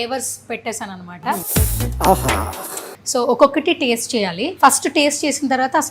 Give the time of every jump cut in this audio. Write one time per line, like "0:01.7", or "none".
0:01.5
0:02.9
0:04.4